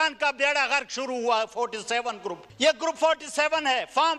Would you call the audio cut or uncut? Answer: cut